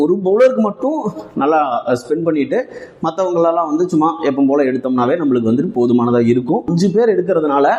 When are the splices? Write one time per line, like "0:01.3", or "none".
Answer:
0:06.7